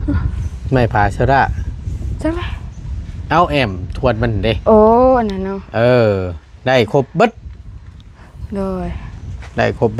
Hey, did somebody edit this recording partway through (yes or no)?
no